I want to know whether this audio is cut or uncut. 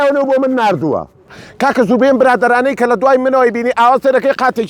cut